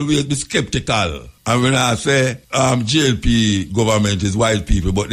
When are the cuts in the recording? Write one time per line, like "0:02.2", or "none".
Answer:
0:01.3
0:02.4